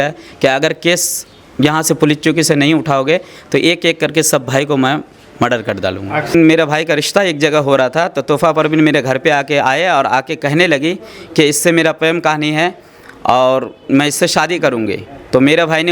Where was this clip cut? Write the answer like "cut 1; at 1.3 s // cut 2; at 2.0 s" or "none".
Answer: cut 1; at 6.3 s